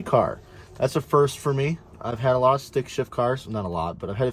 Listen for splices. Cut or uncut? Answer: uncut